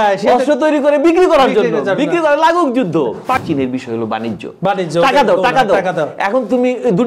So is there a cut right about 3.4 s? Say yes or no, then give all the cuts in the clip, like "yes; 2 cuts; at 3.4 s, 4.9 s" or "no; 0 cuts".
yes; 1 cut; at 3.4 s